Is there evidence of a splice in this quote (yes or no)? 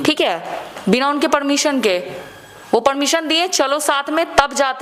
no